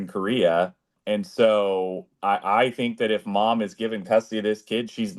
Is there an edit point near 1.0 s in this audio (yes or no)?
yes